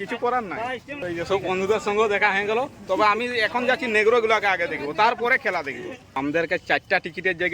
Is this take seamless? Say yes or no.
no